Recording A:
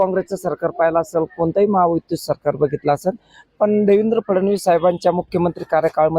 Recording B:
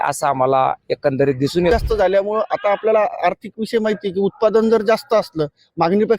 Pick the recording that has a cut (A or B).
B